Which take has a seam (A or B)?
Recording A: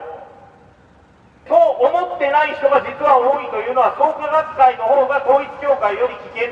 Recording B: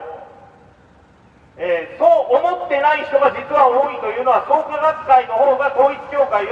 A